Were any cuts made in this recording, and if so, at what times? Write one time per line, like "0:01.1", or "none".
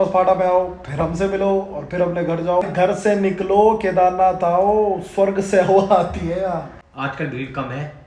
0:02.7
0:06.8